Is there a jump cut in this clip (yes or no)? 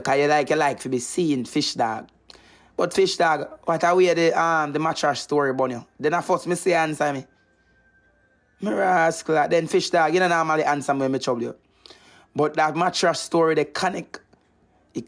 no